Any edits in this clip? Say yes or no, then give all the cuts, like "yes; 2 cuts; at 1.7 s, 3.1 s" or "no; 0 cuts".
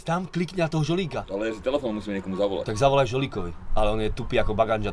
no; 0 cuts